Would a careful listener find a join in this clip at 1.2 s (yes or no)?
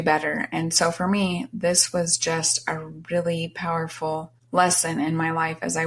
no